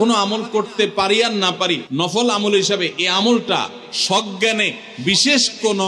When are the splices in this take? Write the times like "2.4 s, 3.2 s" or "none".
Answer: 1.8 s